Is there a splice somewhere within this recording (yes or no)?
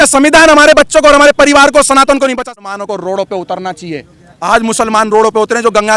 yes